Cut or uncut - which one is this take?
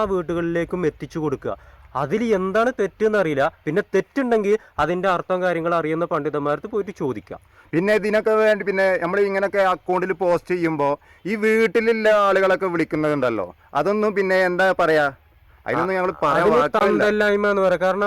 uncut